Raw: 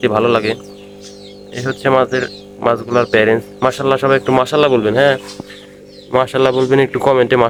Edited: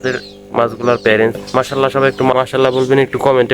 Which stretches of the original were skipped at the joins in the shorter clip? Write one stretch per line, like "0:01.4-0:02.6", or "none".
0:04.4-0:06.1